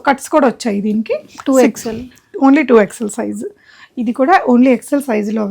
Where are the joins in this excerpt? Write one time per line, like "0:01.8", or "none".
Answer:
none

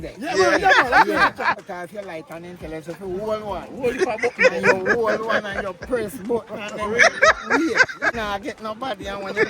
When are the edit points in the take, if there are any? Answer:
0:01.6
0:08.1

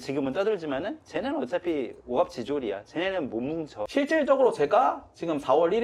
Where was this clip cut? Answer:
0:03.9

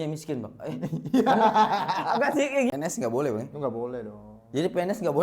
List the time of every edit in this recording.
0:02.7

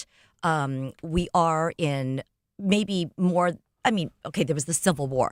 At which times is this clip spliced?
none

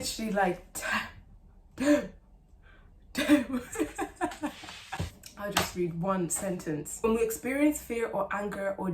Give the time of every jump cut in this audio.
none

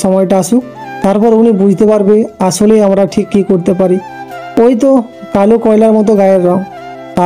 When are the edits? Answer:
none

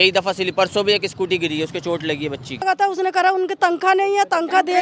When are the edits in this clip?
0:02.6

